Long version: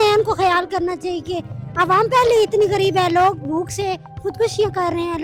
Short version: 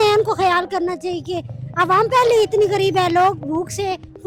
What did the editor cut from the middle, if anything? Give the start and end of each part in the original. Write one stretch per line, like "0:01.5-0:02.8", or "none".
none